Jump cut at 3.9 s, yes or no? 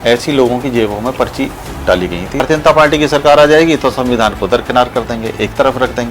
no